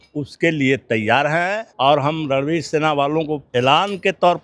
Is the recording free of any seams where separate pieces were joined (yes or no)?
no